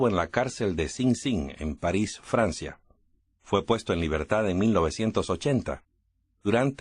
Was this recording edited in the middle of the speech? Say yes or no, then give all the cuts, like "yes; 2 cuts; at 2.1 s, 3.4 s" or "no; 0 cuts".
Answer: yes; 1 cut; at 4.0 s